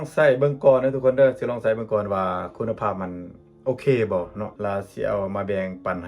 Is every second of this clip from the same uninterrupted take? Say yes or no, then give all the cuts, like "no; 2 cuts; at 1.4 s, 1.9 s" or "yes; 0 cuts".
no; 1 cut; at 4.5 s